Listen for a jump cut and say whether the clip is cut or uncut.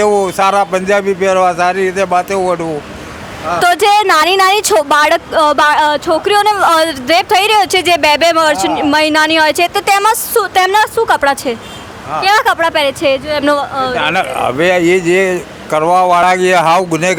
uncut